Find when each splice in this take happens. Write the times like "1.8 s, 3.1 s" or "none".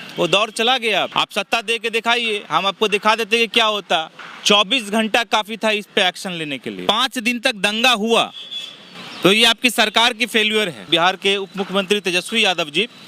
1.1 s, 6.8 s, 10.9 s